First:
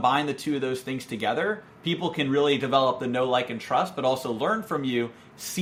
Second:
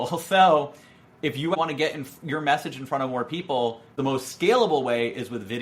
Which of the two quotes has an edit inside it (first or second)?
second